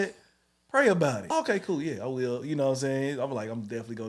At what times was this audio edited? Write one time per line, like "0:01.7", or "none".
0:01.2